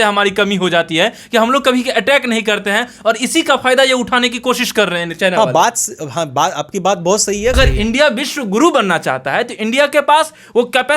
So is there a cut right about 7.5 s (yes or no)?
yes